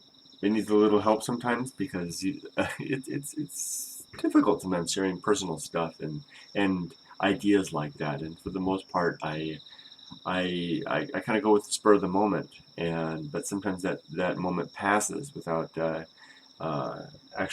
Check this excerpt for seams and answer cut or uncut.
cut